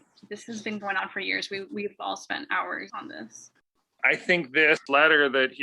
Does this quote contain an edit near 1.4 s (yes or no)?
no